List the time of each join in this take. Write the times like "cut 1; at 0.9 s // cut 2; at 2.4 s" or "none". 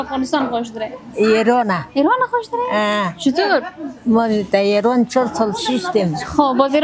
none